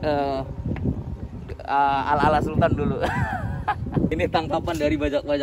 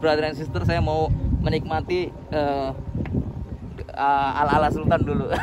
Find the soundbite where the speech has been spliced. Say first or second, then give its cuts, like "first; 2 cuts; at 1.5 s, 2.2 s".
first; 1 cut; at 4.1 s